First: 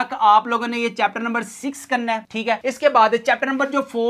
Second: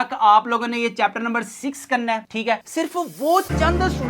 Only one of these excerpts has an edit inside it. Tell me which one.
second; 1 cut; at 2.6 s

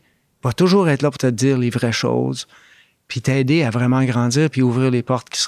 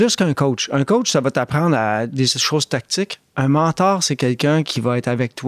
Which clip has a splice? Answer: first; 1 cut; at 1.2 s

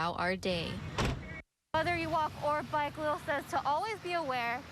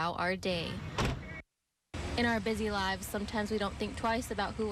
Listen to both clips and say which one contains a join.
first; 1 cut; at 1.7 s

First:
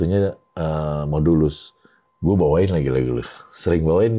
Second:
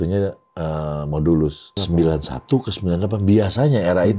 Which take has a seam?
second; 1 cut; at 1.8 s

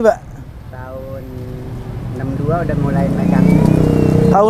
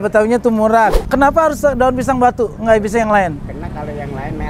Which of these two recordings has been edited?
second; 1 cut; at 1.0 s

